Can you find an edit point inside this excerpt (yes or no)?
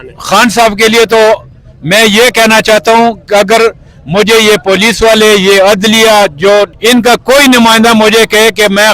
yes